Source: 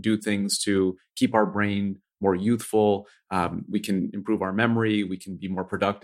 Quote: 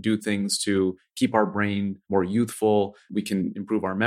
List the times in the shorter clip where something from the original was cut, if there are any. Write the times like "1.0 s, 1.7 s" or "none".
2.0 s, 3.0 s